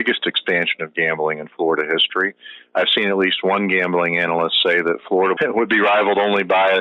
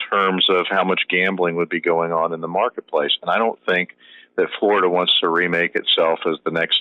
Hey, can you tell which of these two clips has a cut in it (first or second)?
first